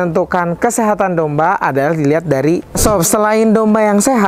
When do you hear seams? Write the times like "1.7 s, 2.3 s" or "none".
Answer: 2.7 s